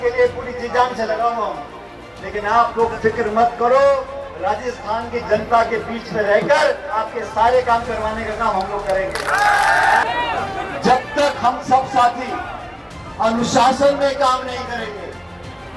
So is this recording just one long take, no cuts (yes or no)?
no